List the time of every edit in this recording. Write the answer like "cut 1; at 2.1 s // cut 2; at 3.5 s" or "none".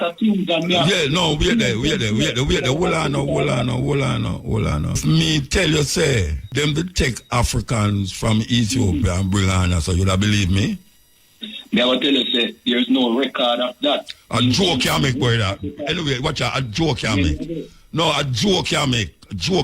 cut 1; at 5.0 s // cut 2; at 6.4 s

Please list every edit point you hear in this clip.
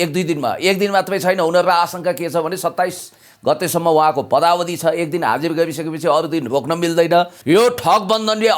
cut 1; at 7.4 s

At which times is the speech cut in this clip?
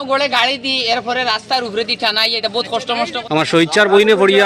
cut 1; at 3.2 s

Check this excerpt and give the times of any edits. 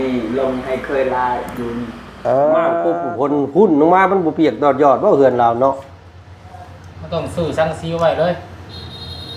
cut 1; at 2.9 s

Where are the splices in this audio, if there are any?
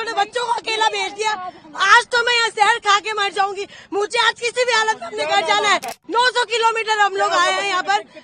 cut 1; at 6.0 s

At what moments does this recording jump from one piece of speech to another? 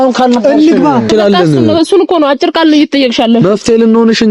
cut 1; at 1.1 s

